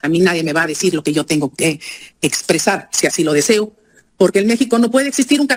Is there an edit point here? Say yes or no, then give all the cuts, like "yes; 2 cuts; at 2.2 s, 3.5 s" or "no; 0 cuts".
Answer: no; 0 cuts